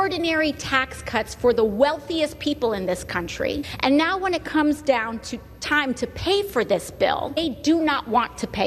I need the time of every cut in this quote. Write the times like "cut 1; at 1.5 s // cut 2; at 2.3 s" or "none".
cut 1; at 3.7 s // cut 2; at 7.4 s